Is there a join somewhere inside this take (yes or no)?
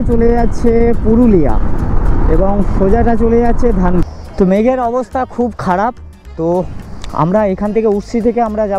yes